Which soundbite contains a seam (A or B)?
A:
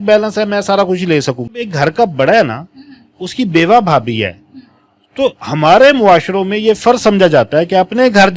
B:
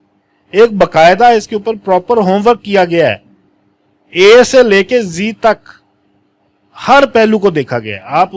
A